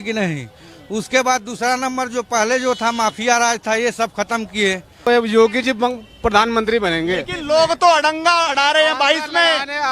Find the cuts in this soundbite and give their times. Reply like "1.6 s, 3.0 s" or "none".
5.1 s